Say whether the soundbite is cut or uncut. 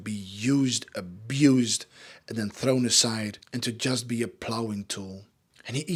uncut